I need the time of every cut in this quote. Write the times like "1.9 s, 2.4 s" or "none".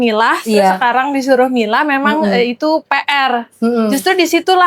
none